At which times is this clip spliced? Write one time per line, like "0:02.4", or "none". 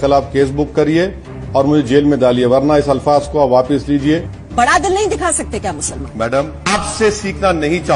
0:04.3
0:06.6